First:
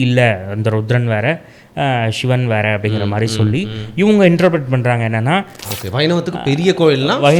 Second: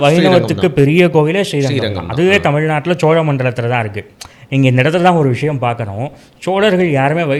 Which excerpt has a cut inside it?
first; 1 cut; at 5.6 s

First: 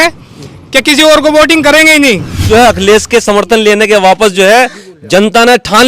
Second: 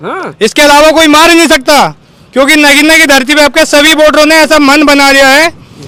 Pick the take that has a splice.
first; 1 cut; at 2.4 s

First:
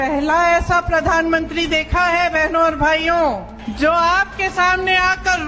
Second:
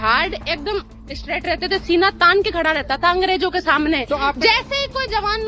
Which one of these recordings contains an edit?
first; 1 cut; at 3.6 s

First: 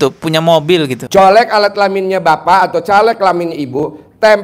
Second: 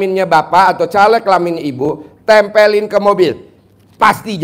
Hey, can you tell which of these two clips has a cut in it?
first; 1 cut; at 1.0 s

